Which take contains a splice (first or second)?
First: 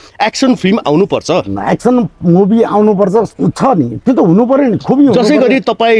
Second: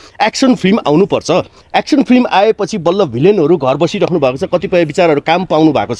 first